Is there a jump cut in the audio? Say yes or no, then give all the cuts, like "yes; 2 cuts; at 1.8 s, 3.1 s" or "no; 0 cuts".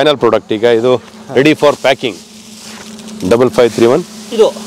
no; 0 cuts